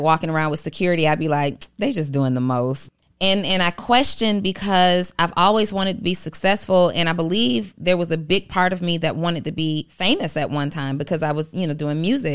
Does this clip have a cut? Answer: yes; 1 cut; at 2.8 s

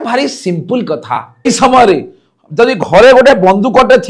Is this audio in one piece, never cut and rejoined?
no; 1 cut; at 1.5 s

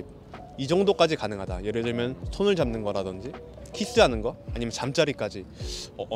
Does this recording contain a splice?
no; 0 cuts

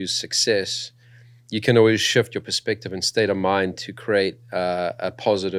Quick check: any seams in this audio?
no; 0 cuts

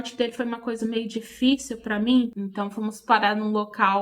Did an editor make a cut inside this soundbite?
yes; 1 cut; at 2.3 s

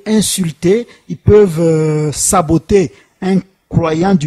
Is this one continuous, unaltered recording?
yes; 0 cuts

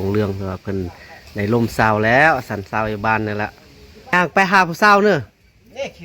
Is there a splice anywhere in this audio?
yes; 1 cut; at 4.1 s

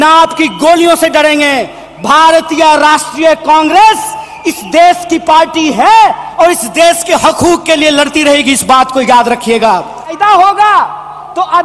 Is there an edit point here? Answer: yes; 1 cut; at 10.1 s

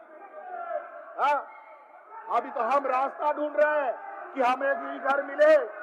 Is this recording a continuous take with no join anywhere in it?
yes; 0 cuts

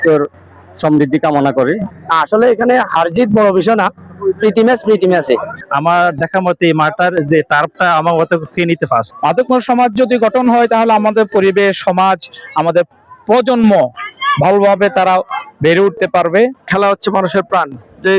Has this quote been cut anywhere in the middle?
yes; 3 cuts; at 5.5 s, 9.1 s, 16.7 s

